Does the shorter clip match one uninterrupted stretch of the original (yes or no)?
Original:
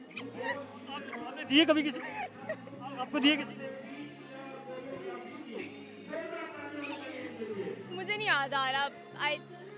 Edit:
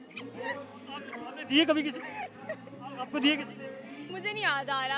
no